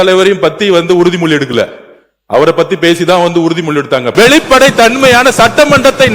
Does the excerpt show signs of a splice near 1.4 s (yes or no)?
no